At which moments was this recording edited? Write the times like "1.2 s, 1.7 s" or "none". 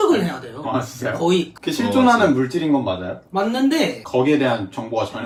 none